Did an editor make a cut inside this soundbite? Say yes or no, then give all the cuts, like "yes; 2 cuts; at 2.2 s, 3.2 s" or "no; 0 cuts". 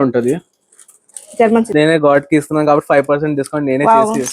yes; 1 cut; at 1.7 s